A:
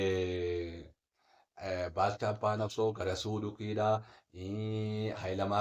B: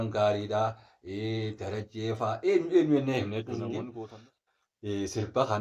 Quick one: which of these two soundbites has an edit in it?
B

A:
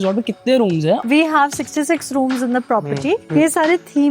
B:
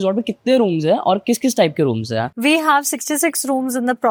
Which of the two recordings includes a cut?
A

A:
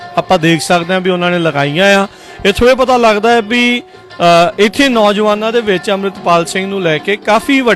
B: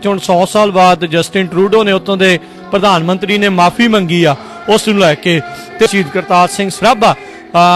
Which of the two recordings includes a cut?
B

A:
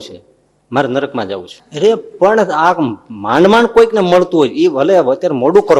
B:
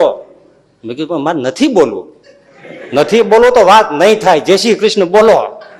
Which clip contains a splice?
A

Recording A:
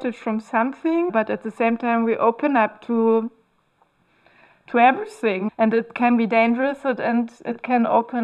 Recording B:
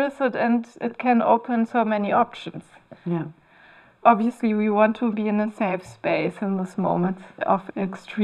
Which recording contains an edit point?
A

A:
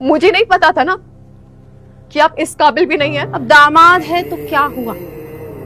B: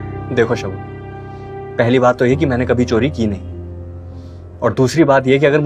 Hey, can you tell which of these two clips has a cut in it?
A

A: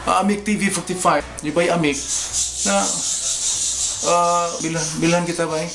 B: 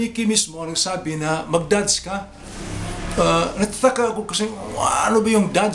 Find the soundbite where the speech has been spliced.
A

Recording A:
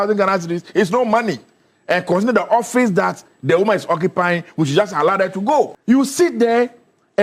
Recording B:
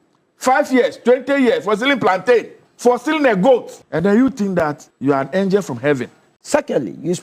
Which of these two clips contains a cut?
B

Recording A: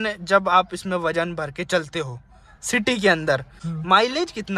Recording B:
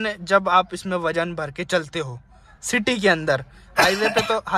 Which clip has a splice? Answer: A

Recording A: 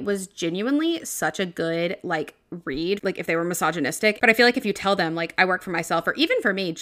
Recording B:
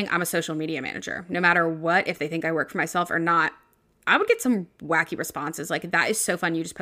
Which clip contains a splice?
A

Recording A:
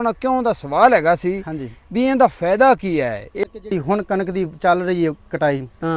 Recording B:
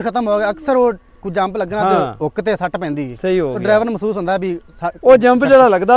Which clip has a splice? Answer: A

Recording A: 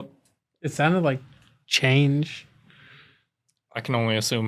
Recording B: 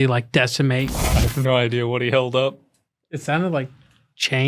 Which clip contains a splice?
B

